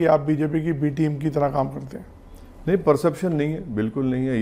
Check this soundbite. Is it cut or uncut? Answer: uncut